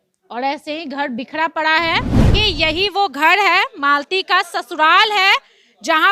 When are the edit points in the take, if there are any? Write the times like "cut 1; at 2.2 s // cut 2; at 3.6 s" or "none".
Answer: cut 1; at 2.3 s